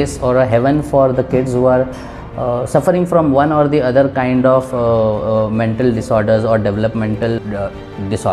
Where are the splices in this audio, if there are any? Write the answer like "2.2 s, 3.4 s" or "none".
7.4 s